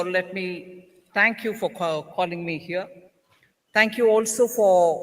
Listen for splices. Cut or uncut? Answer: cut